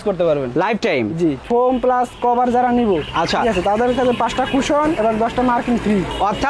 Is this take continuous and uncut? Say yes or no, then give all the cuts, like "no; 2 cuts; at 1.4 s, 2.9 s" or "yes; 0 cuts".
no; 1 cut; at 1.4 s